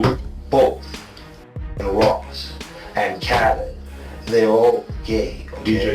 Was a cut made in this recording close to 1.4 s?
yes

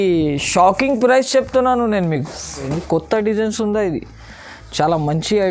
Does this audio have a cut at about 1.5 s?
no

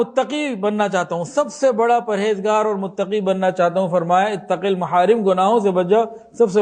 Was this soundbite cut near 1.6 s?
no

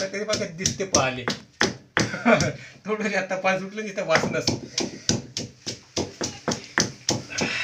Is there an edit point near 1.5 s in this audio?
no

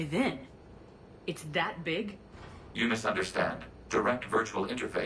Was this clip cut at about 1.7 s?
no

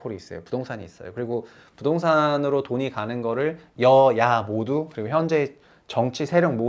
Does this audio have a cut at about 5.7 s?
no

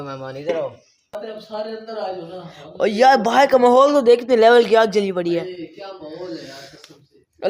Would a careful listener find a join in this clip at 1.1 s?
yes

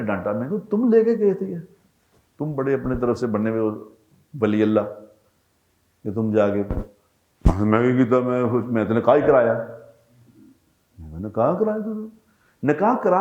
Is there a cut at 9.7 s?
no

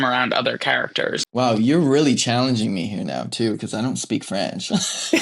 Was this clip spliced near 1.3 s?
yes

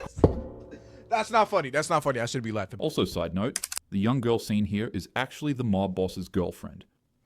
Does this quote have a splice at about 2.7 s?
yes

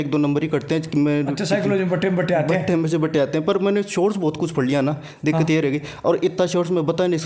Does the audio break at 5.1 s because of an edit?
no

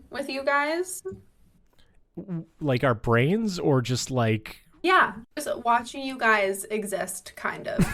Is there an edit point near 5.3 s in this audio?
yes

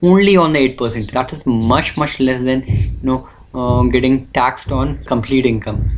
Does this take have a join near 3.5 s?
no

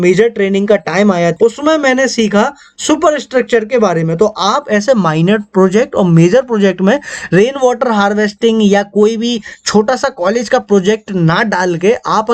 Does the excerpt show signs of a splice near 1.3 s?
yes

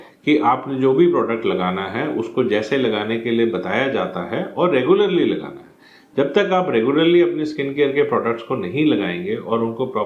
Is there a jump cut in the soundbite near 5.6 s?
no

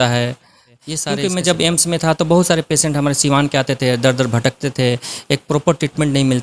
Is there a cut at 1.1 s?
yes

